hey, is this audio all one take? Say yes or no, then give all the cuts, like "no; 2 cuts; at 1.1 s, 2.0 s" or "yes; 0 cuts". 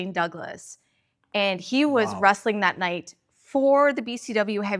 yes; 0 cuts